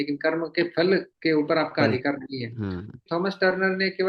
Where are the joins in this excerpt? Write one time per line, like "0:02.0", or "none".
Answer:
0:01.1
0:03.0